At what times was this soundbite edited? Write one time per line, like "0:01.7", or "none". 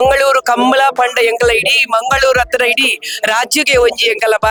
none